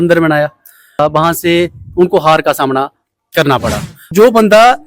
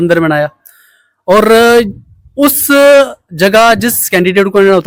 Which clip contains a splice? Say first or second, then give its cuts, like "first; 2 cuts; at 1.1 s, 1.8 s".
first; 2 cuts; at 0.9 s, 4.1 s